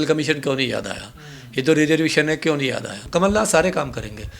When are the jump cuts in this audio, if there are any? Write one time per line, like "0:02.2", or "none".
0:03.0